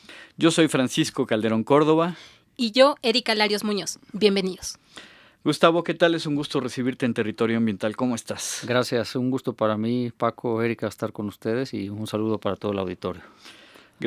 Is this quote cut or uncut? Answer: cut